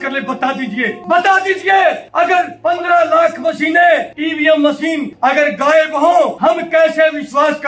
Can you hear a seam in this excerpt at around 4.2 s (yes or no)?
yes